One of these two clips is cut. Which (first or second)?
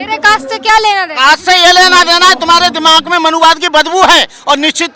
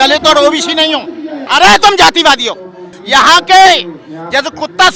second